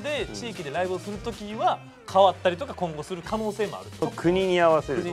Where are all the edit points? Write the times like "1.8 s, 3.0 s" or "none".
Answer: 4.0 s